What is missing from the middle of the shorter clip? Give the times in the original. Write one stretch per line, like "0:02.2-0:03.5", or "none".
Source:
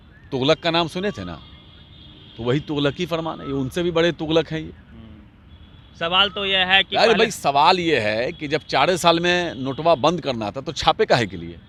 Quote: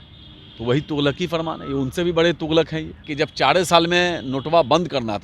0:04.8-0:08.4